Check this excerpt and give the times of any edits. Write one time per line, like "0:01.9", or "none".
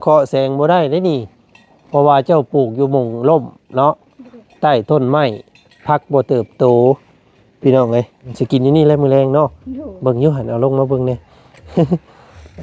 0:08.2